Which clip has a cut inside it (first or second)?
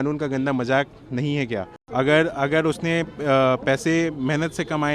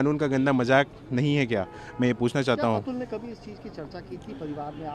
first